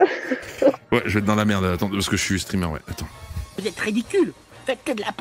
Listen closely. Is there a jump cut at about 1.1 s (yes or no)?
no